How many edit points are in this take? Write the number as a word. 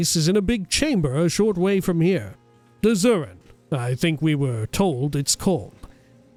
zero